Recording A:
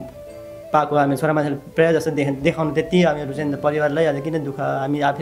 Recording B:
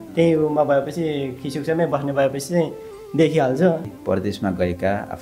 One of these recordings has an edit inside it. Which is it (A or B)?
B